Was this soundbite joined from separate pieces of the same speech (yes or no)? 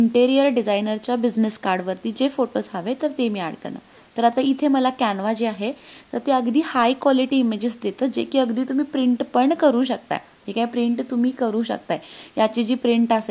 no